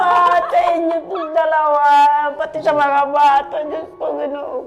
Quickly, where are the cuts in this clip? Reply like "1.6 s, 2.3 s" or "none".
none